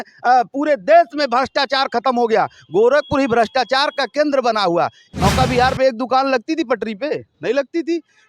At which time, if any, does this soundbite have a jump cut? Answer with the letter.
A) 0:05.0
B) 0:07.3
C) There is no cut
A